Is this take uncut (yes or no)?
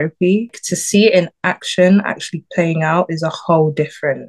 yes